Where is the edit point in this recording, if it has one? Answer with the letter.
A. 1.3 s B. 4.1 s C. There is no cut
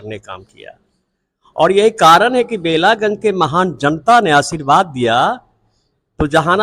C